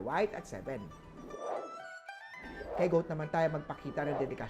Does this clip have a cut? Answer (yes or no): yes